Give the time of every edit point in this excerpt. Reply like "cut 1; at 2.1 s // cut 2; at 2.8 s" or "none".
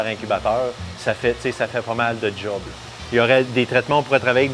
none

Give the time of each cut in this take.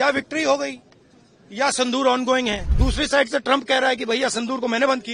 cut 1; at 2.8 s

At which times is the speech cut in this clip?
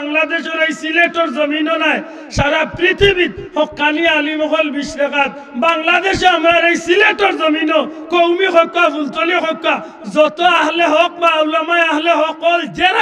none

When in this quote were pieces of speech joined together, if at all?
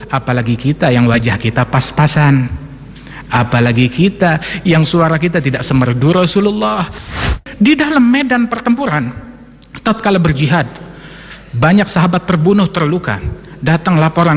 cut 1; at 7.0 s

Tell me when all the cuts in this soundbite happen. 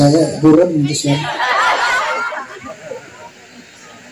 cut 1; at 2.1 s

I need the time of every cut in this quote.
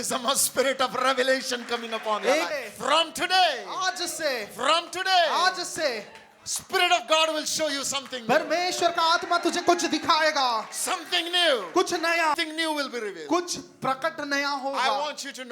cut 1; at 2.5 s // cut 2; at 12.3 s

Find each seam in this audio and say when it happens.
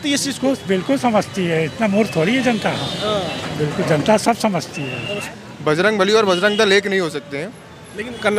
cut 1; at 5.2 s

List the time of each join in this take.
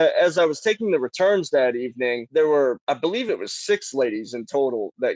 cut 1; at 2.2 s // cut 2; at 2.8 s

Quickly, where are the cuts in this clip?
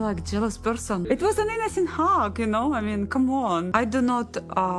cut 1; at 1.0 s // cut 2; at 3.7 s

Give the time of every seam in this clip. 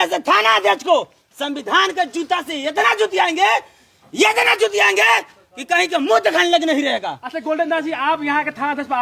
none

